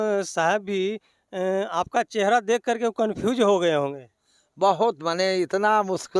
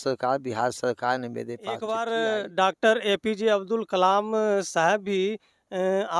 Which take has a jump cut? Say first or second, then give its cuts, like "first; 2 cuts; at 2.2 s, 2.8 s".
second; 1 cut; at 1.9 s